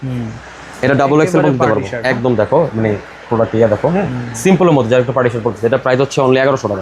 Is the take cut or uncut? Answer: uncut